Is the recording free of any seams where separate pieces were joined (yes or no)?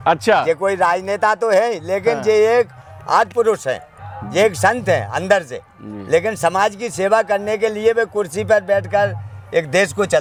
yes